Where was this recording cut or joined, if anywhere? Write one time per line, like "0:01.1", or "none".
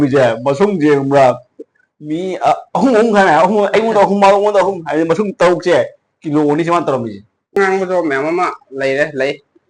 0:07.6